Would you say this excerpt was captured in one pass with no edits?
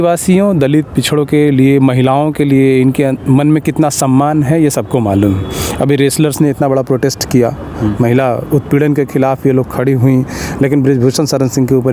yes; 0 cuts

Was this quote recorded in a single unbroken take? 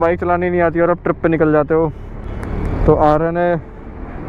yes; 0 cuts

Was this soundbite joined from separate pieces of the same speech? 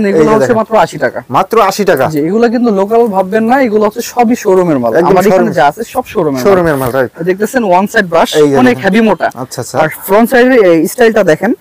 no; 0 cuts

